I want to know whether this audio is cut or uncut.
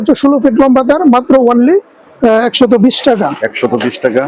uncut